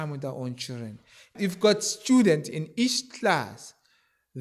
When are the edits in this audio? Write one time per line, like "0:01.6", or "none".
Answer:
0:01.3